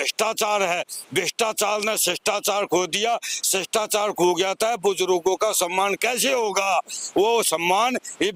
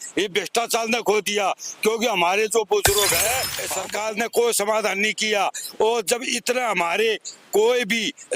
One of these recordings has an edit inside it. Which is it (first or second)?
second